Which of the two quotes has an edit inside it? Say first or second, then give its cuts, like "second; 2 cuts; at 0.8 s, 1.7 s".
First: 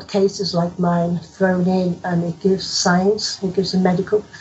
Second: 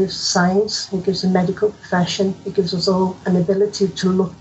second; 1 cut; at 3.2 s